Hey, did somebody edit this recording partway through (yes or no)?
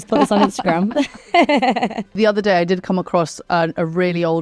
yes